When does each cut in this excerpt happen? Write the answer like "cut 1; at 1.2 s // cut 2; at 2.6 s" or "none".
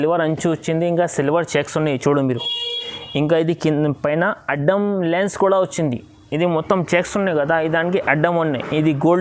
none